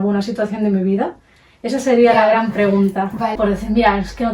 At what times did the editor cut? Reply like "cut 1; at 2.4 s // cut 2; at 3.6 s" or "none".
cut 1; at 3.4 s